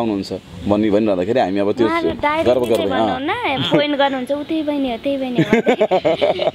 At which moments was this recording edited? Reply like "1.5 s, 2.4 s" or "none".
none